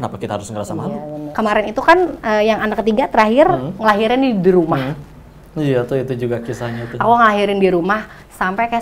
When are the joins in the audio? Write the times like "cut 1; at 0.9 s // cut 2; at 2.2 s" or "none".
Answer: cut 1; at 1.2 s